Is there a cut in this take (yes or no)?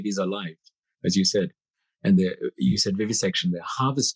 no